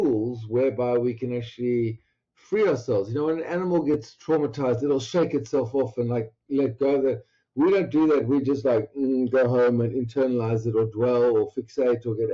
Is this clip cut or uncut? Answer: uncut